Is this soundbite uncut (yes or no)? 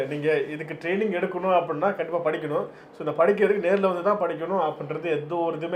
yes